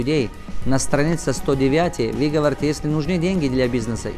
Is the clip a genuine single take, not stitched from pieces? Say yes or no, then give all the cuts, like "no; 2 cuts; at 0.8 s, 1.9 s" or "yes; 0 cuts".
yes; 0 cuts